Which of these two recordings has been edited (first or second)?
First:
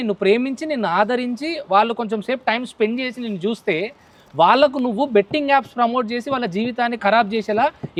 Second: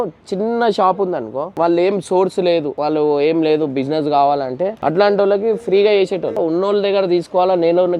second